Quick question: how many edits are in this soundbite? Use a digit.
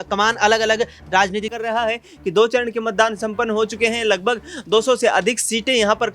1